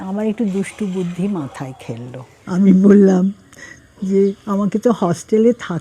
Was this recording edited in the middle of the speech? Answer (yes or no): yes